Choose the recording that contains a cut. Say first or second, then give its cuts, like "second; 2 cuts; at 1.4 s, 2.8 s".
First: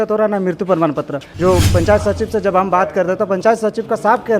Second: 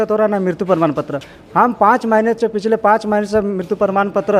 first; 1 cut; at 1.2 s